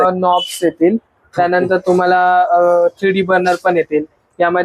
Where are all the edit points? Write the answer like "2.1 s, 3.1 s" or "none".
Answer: none